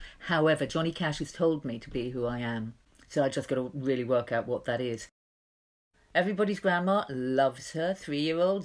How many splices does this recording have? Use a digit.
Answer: 1